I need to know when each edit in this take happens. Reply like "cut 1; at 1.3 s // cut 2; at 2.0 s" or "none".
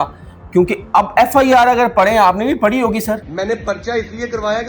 cut 1; at 3.3 s